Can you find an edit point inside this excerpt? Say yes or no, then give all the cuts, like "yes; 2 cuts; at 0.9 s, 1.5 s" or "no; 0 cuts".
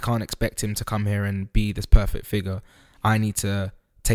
no; 0 cuts